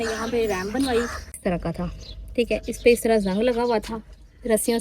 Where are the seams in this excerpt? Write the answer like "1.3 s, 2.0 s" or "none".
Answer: 1.3 s